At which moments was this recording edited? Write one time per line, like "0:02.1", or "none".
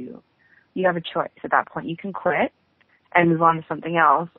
none

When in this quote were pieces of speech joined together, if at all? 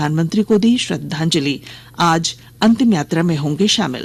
none

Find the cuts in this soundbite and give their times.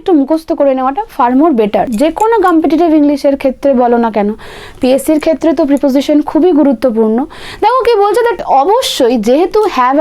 0:01.9
0:08.4

